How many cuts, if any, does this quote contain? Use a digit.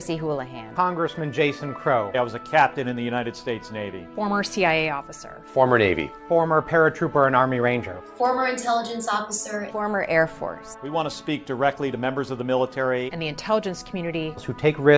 1